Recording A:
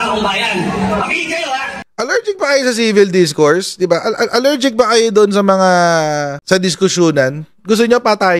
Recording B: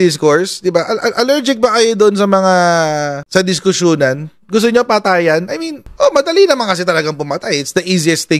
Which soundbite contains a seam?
A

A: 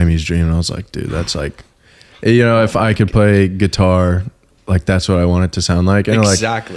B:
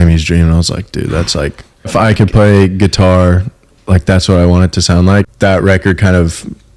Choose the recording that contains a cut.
B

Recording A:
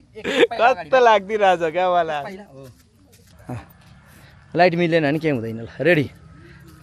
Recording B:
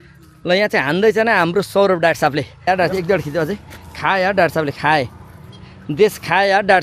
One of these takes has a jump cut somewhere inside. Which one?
B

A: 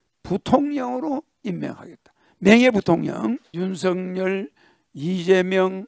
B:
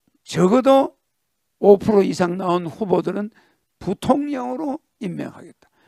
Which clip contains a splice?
A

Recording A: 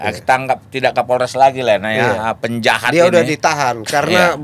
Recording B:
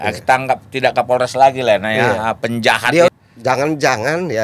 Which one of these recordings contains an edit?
B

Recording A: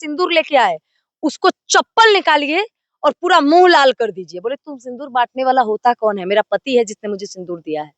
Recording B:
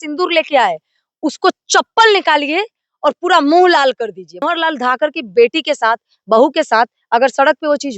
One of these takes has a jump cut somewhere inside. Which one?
B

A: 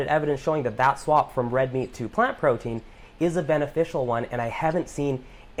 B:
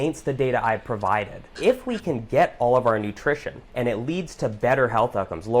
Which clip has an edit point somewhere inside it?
B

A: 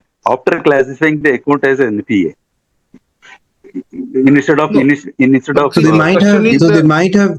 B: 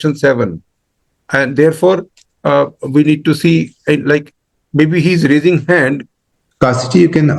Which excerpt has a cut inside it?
B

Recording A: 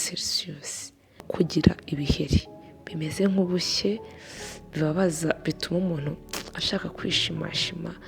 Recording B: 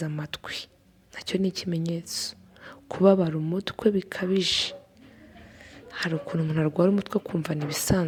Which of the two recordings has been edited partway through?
A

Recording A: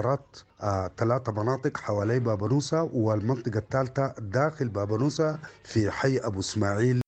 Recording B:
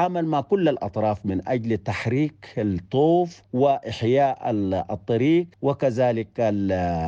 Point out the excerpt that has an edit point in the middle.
B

